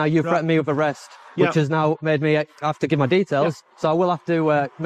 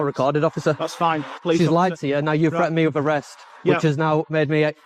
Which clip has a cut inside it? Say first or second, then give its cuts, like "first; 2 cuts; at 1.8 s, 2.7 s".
second; 1 cut; at 1.3 s